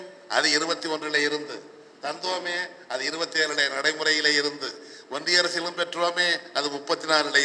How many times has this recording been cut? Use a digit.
0